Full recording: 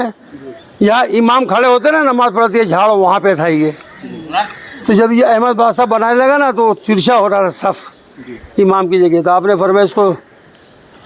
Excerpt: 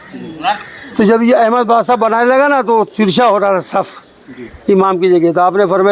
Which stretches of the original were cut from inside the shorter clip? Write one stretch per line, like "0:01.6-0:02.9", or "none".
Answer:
none